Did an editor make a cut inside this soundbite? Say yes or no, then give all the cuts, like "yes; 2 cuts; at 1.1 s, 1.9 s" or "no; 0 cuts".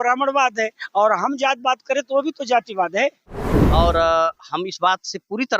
yes; 1 cut; at 3.5 s